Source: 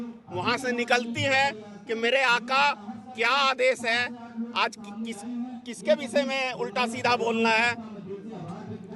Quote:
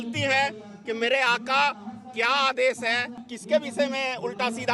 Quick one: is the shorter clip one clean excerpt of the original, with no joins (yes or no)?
no